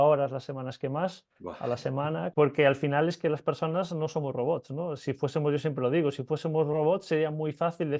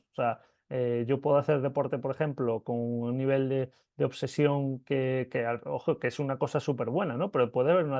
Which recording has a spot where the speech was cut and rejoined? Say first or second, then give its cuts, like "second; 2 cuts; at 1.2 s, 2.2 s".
first; 1 cut; at 2.3 s